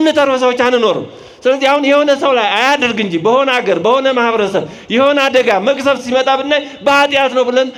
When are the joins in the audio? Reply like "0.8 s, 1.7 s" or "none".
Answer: none